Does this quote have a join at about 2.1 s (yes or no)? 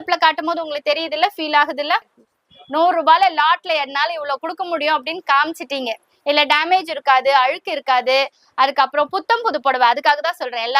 yes